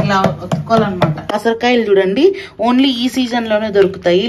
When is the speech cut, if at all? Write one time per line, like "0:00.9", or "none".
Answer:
0:01.4